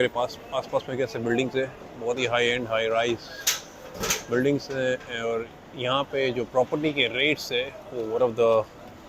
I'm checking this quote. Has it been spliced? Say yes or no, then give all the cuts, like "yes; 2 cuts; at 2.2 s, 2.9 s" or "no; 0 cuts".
no; 0 cuts